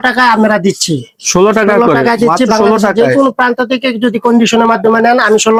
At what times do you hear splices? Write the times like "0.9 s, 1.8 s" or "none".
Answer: none